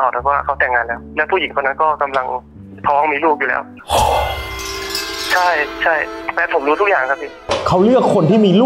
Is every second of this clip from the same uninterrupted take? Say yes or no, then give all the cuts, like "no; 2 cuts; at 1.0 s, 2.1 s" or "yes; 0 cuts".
yes; 0 cuts